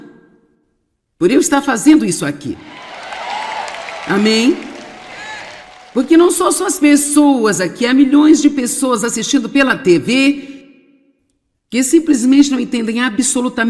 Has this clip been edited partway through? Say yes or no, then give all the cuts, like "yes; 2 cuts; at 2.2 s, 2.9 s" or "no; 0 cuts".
no; 0 cuts